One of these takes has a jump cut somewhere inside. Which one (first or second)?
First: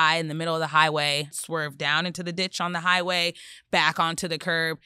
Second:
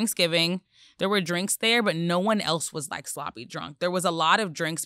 first